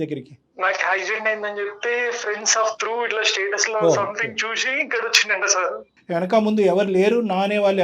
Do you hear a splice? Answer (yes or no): no